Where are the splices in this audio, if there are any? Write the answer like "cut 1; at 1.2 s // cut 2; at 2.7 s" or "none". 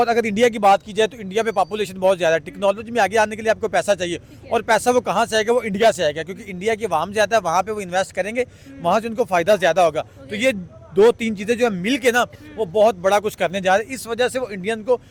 none